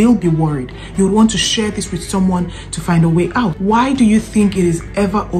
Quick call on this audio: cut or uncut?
cut